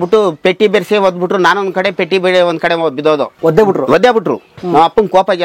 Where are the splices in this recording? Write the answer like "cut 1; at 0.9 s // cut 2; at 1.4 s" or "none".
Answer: cut 1; at 3.3 s